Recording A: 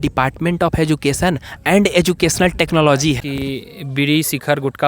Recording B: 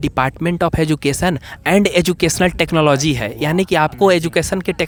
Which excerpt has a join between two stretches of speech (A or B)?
A